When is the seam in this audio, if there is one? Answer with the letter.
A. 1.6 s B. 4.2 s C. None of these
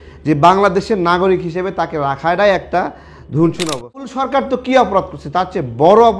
B